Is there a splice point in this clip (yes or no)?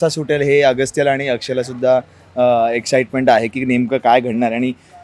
no